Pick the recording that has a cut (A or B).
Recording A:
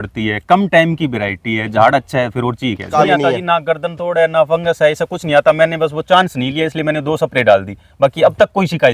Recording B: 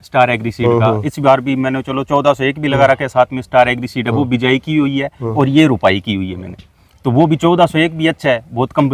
A